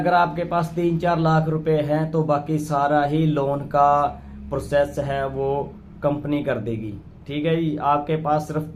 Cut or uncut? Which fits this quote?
uncut